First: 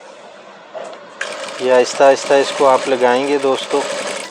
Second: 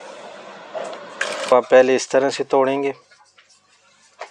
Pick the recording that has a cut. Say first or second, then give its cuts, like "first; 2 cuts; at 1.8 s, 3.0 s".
second; 1 cut; at 1.5 s